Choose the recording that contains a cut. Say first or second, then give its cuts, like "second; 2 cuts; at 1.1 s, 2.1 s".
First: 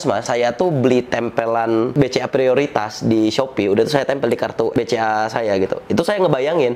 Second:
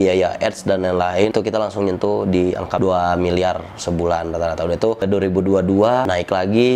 second; 1 cut; at 1.3 s